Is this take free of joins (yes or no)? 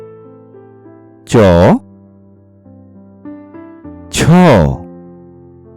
no